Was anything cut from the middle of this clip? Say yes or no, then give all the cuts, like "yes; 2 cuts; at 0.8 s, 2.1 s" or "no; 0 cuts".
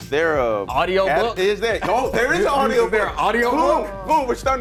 no; 0 cuts